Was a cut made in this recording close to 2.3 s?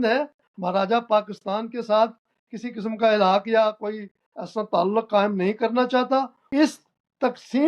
no; 1 cut; at 6.4 s

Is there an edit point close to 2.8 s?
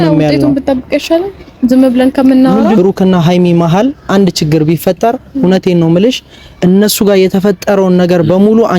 yes; 1 cut; at 2.8 s

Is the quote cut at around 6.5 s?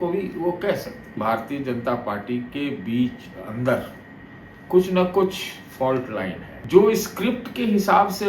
yes; 2 cuts; at 1.2 s, 6.5 s

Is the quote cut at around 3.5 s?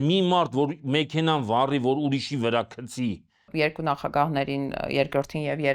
yes; 1 cut; at 3.5 s

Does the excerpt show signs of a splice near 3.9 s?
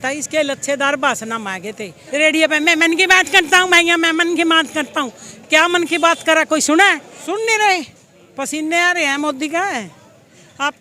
no; 2 cuts; at 1.9 s, 7.1 s

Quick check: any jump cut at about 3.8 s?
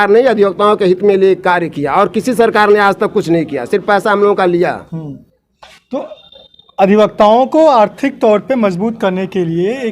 no; 0 cuts

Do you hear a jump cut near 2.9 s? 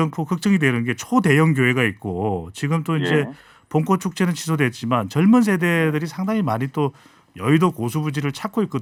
no; 0 cuts

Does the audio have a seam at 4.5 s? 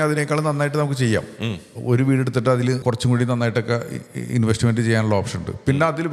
no; 1 cut; at 2.8 s

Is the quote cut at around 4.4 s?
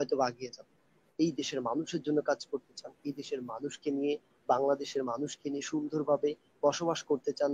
no; 1 cut; at 1.0 s

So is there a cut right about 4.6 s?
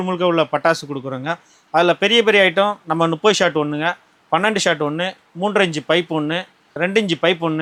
no; 0 cuts

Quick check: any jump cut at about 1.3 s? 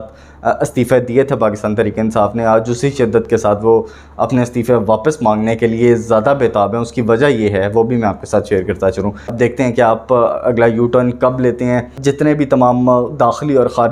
no; 2 cuts; at 9.3 s, 12.0 s

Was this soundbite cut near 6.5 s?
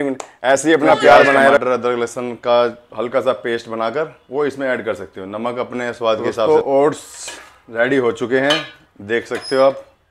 yes; 2 cuts; at 1.6 s, 6.5 s

